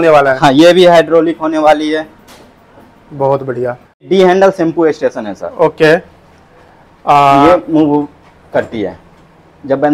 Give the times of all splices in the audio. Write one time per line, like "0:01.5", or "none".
0:04.1